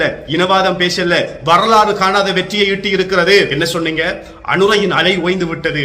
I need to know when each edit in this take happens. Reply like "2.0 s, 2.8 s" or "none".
3.5 s